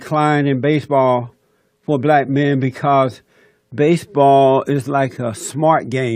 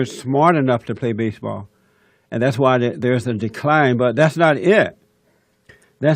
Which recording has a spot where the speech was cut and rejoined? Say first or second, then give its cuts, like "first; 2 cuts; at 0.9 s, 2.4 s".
second; 1 cut; at 2.6 s